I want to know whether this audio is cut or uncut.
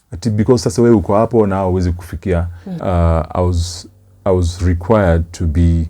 cut